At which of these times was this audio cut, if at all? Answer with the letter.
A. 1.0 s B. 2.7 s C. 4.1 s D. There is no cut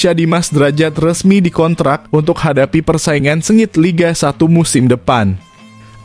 D